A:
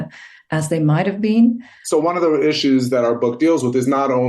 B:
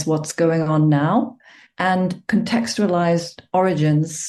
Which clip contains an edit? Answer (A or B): A